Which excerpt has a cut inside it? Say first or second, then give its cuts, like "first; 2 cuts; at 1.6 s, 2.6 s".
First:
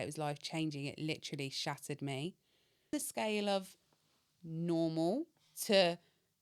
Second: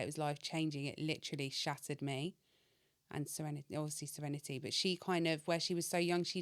first; 1 cut; at 2.9 s